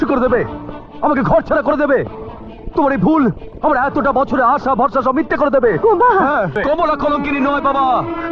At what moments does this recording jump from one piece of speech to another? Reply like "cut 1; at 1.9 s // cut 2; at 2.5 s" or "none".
cut 1; at 6.6 s